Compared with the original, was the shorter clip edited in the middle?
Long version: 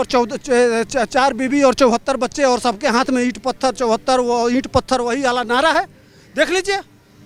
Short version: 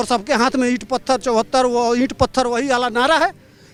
no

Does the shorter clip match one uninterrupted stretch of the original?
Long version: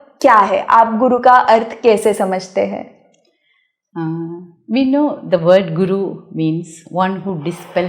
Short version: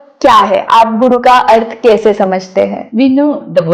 no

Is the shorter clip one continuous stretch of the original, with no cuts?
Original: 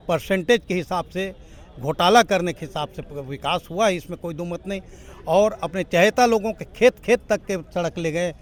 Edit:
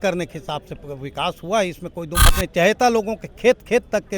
no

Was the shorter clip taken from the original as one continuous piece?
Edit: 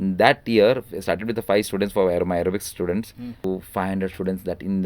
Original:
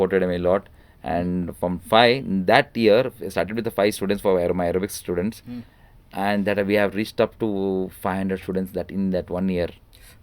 no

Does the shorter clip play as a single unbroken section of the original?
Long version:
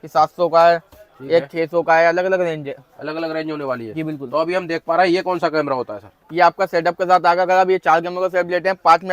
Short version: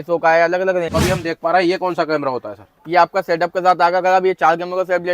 no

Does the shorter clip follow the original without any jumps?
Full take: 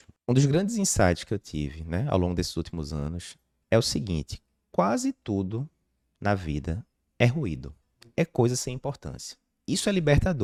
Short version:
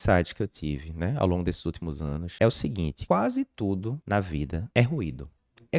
no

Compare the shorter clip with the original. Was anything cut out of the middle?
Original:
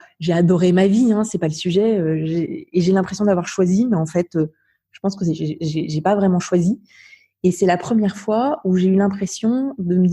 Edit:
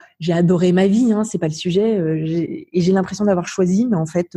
no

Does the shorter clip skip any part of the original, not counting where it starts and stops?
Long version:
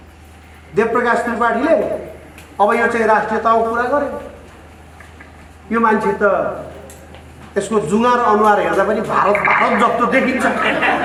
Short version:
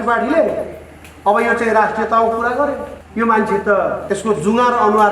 yes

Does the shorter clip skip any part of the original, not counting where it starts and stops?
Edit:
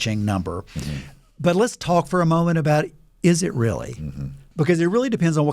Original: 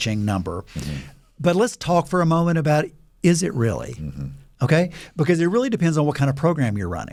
yes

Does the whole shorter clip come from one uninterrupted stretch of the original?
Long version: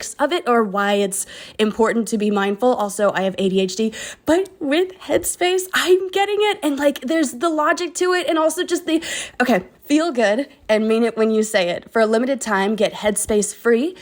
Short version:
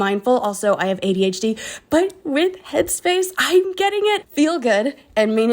no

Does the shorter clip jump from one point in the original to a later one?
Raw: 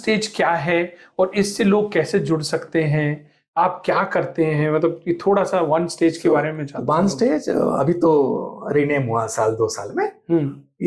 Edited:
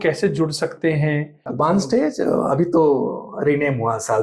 yes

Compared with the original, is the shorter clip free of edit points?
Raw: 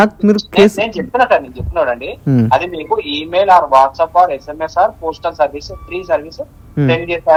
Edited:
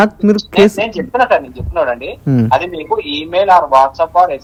yes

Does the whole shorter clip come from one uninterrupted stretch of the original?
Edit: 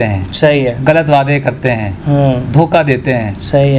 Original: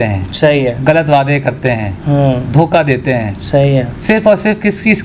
yes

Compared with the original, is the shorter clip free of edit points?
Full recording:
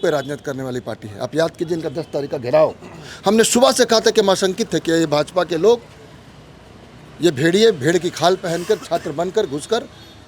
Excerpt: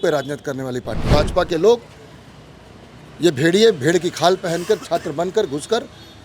no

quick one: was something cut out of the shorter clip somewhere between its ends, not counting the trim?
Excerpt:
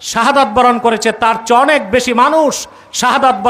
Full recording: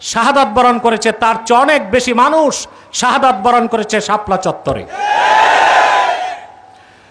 no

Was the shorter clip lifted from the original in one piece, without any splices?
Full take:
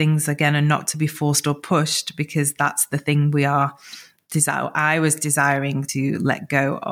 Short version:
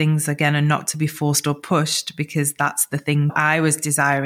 no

